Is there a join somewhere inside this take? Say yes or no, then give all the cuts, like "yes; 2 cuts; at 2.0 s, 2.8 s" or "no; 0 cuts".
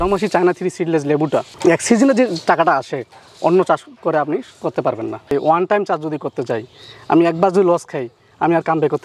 yes; 1 cut; at 5.2 s